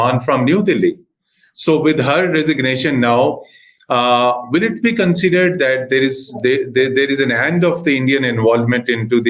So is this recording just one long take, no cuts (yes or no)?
yes